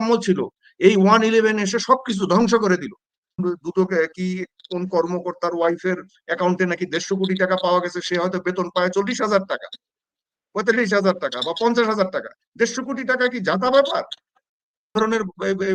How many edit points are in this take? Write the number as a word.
two